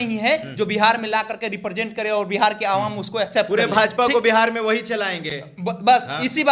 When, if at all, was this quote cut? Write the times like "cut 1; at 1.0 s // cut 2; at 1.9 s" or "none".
none